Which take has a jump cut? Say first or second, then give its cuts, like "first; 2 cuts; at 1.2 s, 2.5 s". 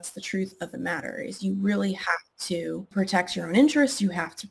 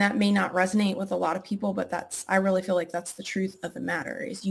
first; 1 cut; at 2.9 s